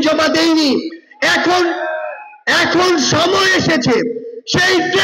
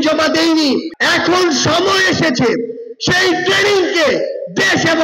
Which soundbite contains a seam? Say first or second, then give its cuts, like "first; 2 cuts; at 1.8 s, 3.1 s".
second; 1 cut; at 1.0 s